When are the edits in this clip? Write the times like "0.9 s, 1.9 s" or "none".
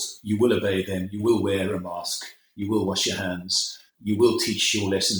3.9 s